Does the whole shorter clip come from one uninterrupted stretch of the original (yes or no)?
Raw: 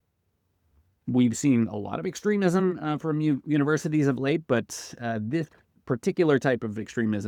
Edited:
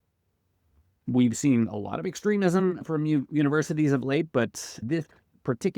no